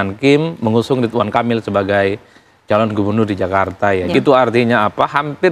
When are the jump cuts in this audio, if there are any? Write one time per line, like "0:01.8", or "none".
0:04.1